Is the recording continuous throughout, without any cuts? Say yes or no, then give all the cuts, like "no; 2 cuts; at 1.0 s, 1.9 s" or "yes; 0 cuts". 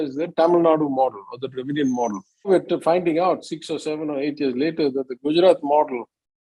no; 1 cut; at 2.5 s